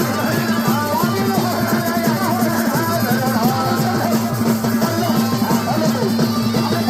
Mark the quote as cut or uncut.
uncut